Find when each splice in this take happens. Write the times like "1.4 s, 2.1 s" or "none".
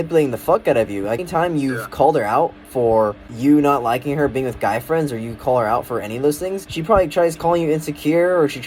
1.2 s, 3.3 s, 6.7 s